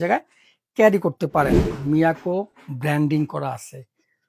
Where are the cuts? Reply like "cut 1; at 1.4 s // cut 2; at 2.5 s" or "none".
cut 1; at 1.7 s